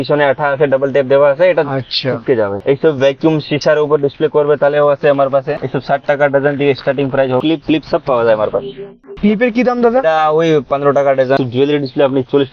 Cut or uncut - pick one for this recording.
cut